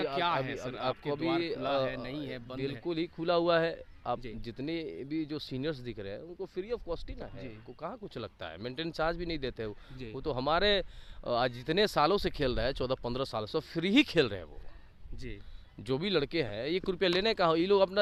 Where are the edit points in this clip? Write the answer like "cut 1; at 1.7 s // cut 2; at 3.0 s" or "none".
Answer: none

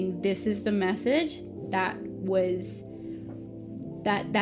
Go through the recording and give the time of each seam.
none

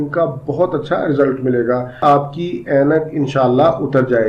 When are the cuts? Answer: cut 1; at 2.0 s

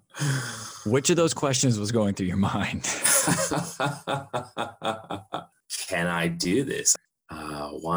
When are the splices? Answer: cut 1; at 5.4 s // cut 2; at 6.9 s

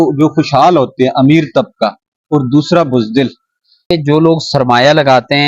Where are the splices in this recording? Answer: cut 1; at 3.8 s

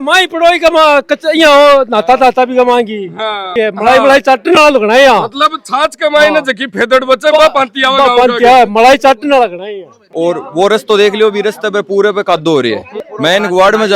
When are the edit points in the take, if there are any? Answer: cut 1; at 3.5 s // cut 2; at 10.0 s

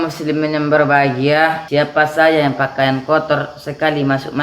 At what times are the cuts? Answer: cut 1; at 1.6 s

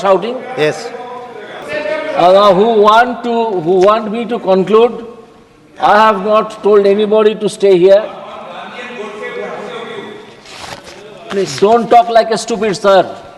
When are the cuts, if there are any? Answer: cut 1; at 1.6 s

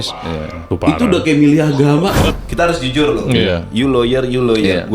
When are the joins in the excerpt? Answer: cut 1; at 2.2 s

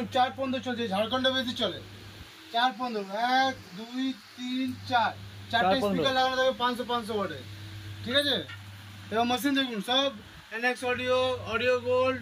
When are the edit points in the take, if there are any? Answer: none

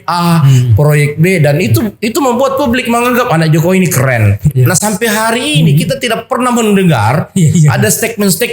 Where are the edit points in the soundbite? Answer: cut 1; at 4.5 s

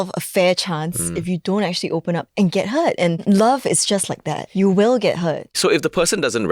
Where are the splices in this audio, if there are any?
cut 1; at 3.2 s // cut 2; at 4.4 s // cut 3; at 5.5 s

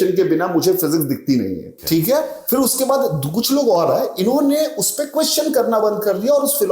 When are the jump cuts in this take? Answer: cut 1; at 1.7 s

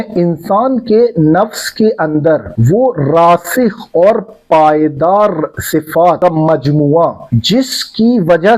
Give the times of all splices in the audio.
cut 1; at 2.5 s // cut 2; at 6.2 s // cut 3; at 7.3 s

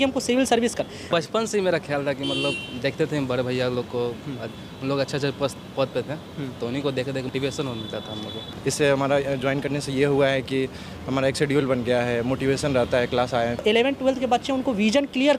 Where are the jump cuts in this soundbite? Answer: cut 1; at 1.1 s // cut 2; at 8.5 s // cut 3; at 13.6 s

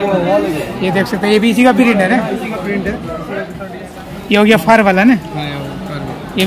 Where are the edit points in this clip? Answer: cut 1; at 3.6 s

